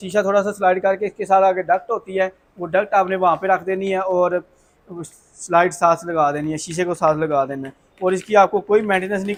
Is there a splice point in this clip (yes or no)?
no